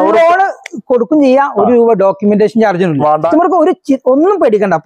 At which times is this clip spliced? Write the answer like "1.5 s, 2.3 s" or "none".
3.3 s